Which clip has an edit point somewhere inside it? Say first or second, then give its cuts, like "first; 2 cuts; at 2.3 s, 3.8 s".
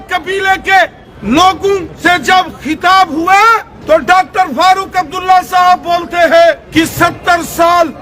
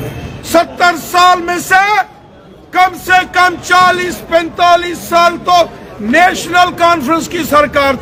first; 4 cuts; at 1.1 s, 1.9 s, 3.7 s, 6.6 s